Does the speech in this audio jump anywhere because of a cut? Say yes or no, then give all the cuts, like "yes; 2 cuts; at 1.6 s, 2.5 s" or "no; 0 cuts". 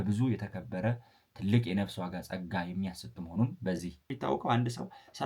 yes; 1 cut; at 4.1 s